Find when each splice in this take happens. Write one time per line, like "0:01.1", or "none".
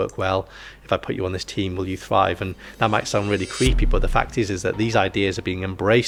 none